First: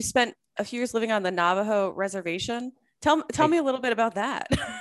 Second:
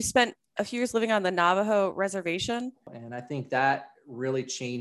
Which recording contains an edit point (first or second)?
second